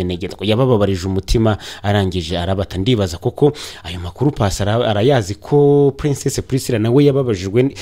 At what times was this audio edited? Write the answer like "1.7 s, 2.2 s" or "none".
none